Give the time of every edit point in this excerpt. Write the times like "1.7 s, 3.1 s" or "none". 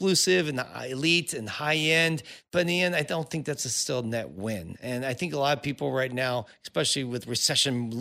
none